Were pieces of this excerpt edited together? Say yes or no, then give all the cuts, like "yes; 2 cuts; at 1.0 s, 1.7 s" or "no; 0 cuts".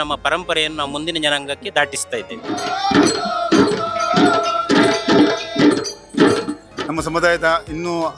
no; 0 cuts